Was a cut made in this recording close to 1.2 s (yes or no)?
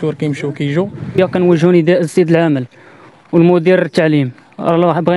yes